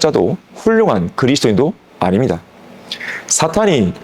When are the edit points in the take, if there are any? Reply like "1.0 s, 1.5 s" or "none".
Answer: none